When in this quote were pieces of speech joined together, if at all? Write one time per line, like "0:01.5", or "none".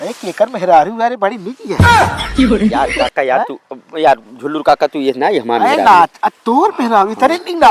0:01.8
0:03.1